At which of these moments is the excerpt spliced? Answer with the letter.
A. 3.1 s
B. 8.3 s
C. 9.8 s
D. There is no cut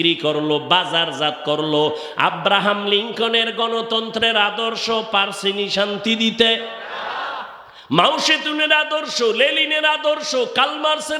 D